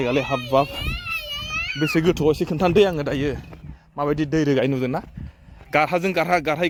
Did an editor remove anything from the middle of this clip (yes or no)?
no